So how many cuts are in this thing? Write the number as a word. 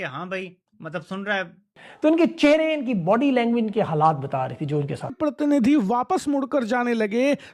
one